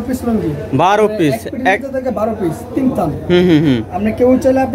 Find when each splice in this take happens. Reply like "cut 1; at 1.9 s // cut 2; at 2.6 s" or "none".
none